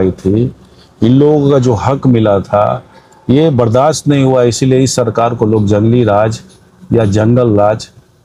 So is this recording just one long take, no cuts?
yes; 0 cuts

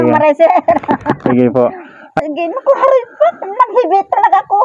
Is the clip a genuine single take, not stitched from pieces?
no; 1 cut; at 2.2 s

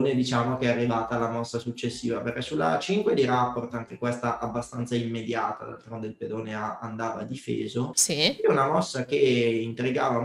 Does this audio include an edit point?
no; 0 cuts

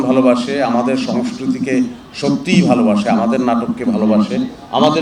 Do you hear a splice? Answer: no; 0 cuts

